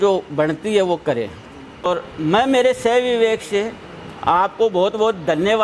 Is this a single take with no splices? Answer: no; 1 cut; at 1.8 s

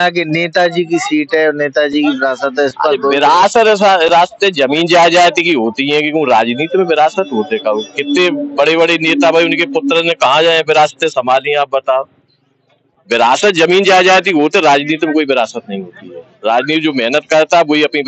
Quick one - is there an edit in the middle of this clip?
no; 0 cuts

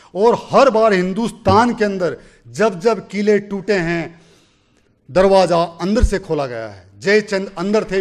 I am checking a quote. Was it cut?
no; 0 cuts

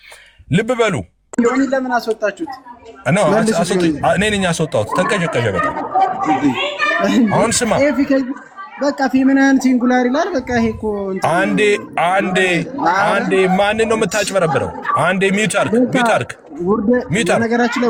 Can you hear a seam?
no; 0 cuts

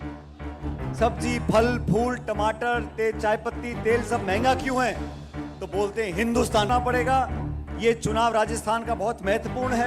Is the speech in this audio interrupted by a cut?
yes; 2 cuts; at 0.9 s, 6.7 s

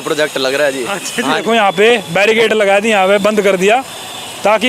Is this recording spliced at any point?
yes; 1 cut; at 1.4 s

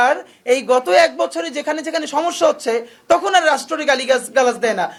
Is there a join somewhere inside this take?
no; 0 cuts

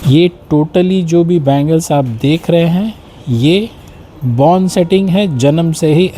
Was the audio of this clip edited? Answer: no; 0 cuts

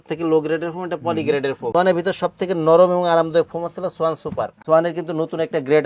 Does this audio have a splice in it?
yes; 2 cuts; at 1.6 s, 4.6 s

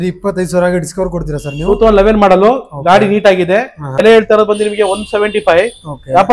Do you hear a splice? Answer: yes; 1 cut; at 4.0 s

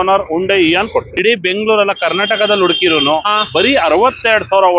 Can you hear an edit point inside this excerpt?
yes; 1 cut; at 1.1 s

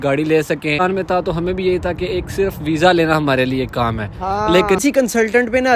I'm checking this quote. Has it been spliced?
yes; 2 cuts; at 0.8 s, 4.8 s

